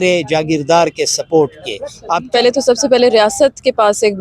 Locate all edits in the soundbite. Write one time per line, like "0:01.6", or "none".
0:02.1